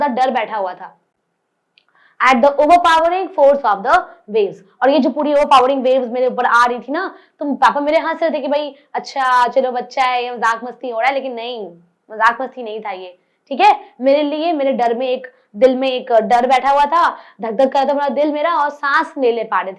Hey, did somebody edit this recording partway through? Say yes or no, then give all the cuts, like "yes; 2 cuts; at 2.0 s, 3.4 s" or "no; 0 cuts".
no; 0 cuts